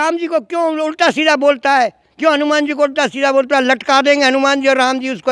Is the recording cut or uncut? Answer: uncut